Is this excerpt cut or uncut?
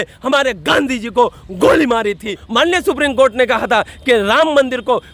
cut